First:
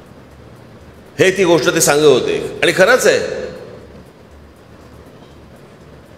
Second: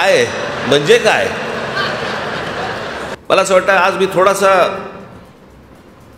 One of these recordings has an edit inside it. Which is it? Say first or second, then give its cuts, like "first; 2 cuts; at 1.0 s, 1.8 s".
second; 1 cut; at 3.1 s